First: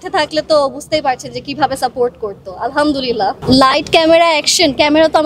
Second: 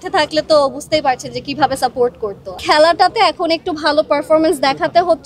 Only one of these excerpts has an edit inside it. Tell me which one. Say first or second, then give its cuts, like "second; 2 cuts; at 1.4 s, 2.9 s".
second; 1 cut; at 2.6 s